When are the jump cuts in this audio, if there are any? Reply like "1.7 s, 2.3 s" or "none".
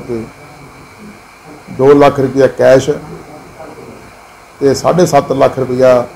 none